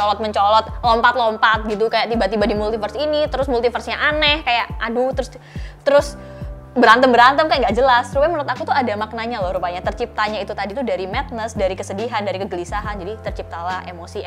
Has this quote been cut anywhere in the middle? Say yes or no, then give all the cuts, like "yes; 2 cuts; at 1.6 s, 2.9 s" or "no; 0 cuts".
no; 0 cuts